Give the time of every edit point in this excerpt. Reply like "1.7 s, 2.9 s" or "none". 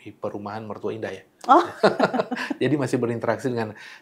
none